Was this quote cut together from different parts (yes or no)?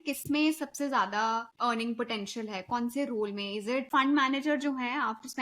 yes